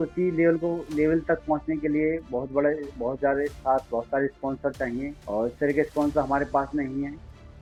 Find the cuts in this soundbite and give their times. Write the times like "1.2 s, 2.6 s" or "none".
none